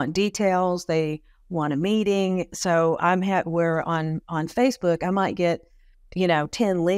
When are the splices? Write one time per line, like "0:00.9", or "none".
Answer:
none